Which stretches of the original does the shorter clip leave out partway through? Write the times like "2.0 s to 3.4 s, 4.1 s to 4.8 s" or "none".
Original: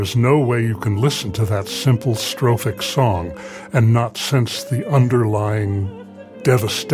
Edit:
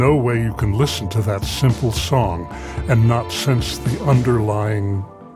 2.2 s to 2.9 s